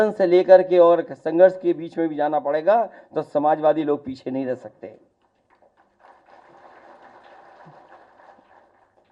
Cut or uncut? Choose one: uncut